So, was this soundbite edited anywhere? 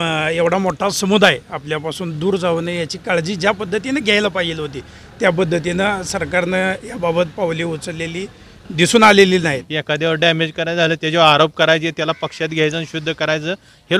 yes; 1 cut; at 9.7 s

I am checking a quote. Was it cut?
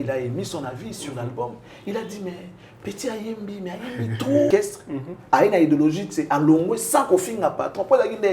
yes; 1 cut; at 4.5 s

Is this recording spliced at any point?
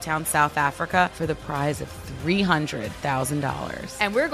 yes; 1 cut; at 1.1 s

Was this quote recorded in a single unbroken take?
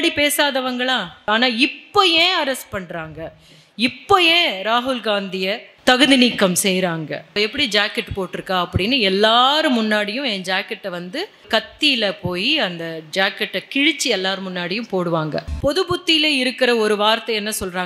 no; 5 cuts; at 1.3 s, 5.7 s, 7.3 s, 11.5 s, 15.5 s

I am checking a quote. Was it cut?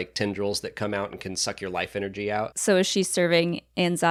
no; 0 cuts

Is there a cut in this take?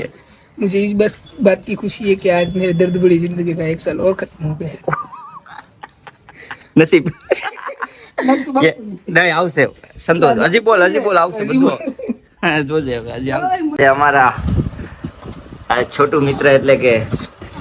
no; 0 cuts

